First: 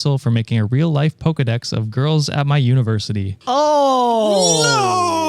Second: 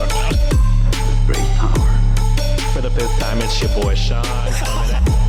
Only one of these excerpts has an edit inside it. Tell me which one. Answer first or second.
first